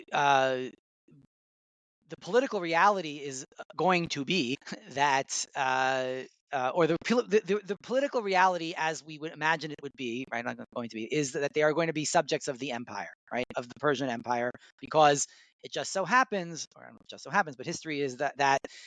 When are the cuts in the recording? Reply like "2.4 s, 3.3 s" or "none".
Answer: 4.7 s